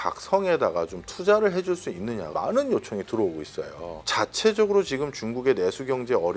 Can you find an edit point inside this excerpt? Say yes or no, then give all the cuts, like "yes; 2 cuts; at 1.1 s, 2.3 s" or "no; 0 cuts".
yes; 1 cut; at 4.0 s